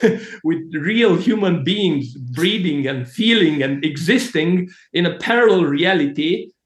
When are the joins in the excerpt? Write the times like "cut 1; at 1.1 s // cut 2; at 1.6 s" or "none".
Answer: none